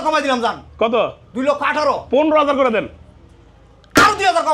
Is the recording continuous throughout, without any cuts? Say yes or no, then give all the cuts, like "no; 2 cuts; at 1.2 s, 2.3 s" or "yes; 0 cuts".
yes; 0 cuts